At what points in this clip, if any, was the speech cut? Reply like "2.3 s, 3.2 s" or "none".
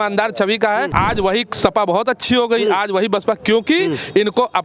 0.9 s